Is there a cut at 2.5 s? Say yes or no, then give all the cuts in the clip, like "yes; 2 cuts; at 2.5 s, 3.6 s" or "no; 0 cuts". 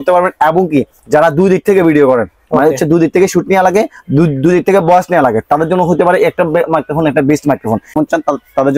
no; 1 cut; at 7.9 s